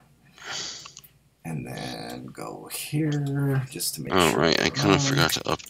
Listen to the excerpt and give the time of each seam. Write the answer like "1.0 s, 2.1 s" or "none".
1.1 s